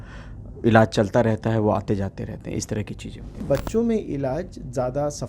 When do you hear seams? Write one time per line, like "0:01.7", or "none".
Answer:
0:03.4